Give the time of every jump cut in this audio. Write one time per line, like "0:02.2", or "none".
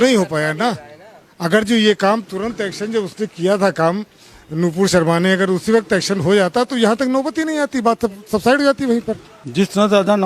0:09.3